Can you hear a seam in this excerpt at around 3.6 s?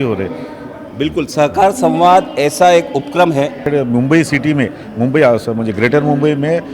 yes; 1 cut; at 3.6 s

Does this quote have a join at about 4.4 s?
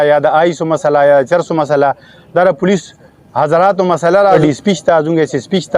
yes; 1 cut; at 4.4 s

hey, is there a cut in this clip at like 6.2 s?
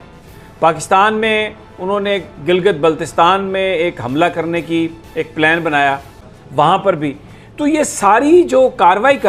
yes; 1 cut; at 6.2 s

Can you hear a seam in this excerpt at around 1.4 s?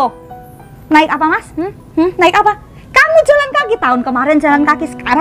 no; 0 cuts

